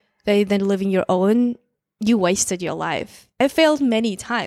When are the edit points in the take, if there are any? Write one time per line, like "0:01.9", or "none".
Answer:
0:03.3